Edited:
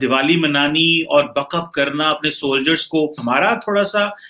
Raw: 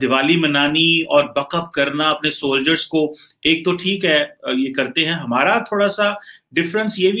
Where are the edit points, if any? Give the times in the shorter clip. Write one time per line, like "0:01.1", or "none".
0:03.2